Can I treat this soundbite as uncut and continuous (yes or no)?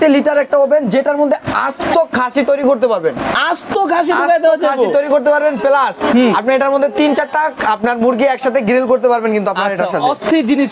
yes